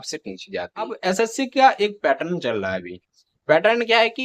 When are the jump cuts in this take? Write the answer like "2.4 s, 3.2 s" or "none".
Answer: 1.0 s